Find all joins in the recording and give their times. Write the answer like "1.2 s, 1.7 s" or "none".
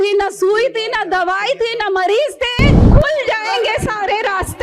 2.8 s

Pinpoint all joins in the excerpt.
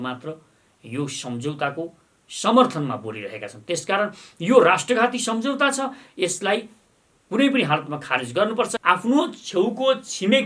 8.8 s

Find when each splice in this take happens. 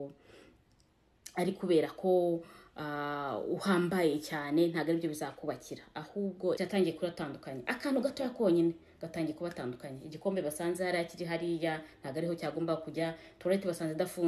6.6 s

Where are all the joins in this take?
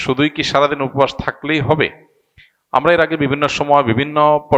none

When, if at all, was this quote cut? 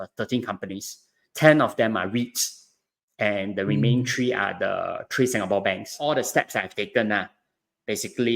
6.1 s

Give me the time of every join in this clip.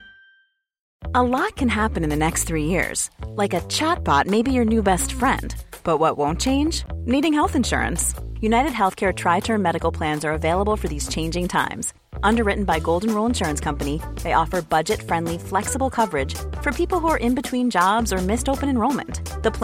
0.9 s

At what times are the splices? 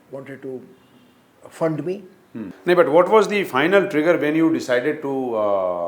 2.5 s

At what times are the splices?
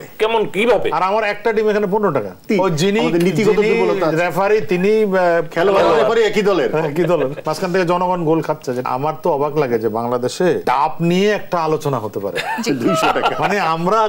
2.4 s, 7.4 s, 8.8 s, 10.6 s

